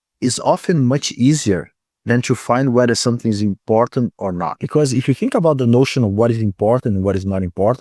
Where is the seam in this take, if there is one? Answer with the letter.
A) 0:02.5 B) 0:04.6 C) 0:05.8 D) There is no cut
B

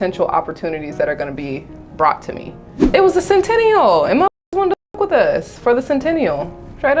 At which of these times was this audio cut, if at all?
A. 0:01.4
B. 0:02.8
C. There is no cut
B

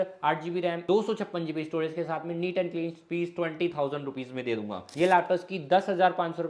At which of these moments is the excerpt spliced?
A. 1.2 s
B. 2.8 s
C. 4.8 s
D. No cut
C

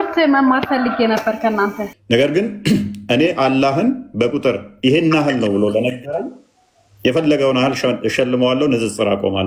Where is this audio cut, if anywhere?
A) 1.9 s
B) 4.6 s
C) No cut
A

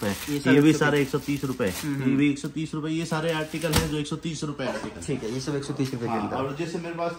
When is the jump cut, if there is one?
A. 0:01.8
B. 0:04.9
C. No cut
C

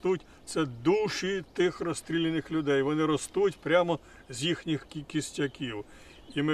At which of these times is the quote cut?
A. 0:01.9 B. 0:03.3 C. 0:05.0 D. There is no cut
B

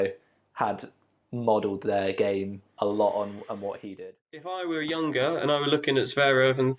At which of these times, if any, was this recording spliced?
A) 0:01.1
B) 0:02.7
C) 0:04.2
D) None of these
C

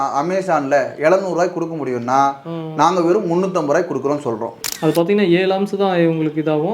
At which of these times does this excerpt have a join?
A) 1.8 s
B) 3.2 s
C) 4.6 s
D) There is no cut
C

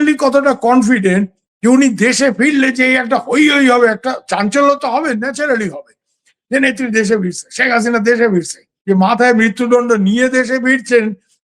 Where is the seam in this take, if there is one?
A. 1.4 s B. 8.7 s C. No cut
B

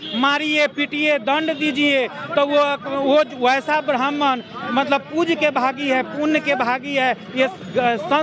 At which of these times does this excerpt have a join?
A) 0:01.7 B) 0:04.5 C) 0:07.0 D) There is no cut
D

